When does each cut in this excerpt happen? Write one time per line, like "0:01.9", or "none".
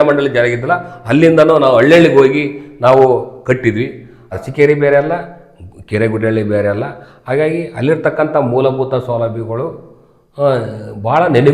0:04.3

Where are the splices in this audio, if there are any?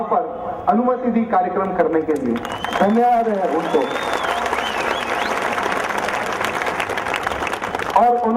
0:01.0

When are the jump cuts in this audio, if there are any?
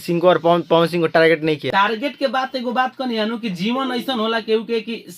0:01.7

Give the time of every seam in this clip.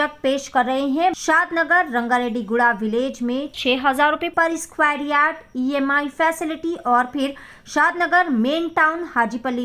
0:01.2

